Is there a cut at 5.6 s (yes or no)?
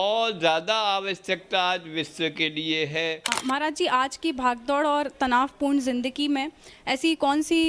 no